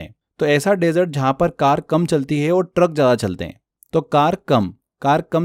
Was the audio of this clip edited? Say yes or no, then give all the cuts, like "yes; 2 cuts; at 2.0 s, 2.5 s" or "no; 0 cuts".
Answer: no; 0 cuts